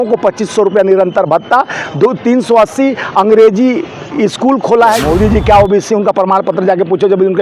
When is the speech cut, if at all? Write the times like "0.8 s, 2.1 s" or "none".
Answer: 5.0 s